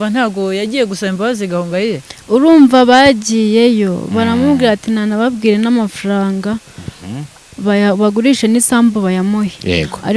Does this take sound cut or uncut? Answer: uncut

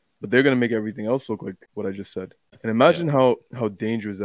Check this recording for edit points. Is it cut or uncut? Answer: cut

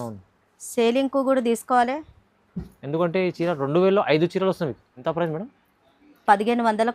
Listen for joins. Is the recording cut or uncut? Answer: cut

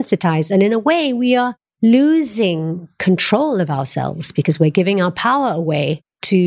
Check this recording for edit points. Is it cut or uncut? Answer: uncut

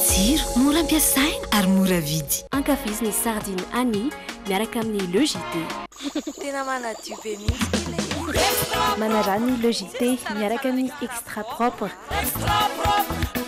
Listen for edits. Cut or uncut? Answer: uncut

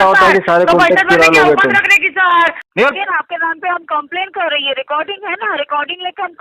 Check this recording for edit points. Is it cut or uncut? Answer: cut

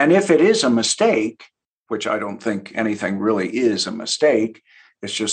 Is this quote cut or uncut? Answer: uncut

